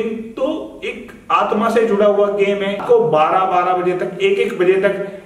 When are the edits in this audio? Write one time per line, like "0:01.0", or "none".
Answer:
0:02.8